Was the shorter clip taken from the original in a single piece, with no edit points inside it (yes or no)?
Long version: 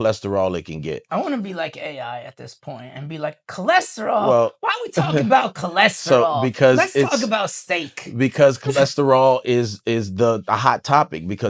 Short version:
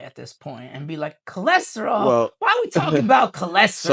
yes